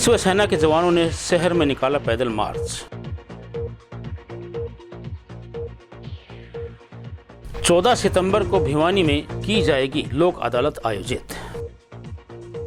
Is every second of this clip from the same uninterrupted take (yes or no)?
yes